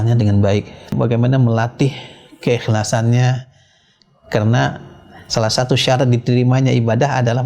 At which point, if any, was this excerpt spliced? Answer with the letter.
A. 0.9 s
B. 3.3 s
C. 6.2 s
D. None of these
A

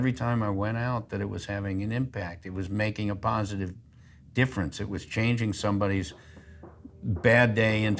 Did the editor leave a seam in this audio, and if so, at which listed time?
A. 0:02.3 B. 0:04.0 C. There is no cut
C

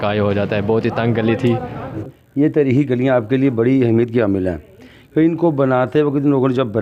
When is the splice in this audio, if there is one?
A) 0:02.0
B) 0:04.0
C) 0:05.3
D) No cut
A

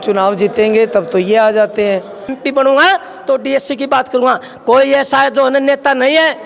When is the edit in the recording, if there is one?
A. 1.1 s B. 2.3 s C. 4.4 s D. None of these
B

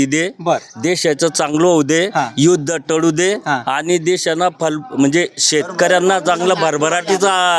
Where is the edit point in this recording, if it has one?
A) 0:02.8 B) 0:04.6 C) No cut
C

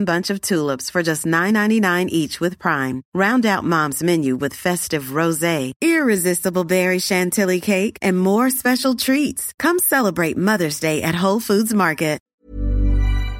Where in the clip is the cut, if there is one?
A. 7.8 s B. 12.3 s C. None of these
B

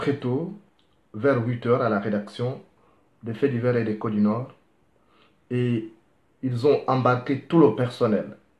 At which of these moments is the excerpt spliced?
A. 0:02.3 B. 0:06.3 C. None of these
C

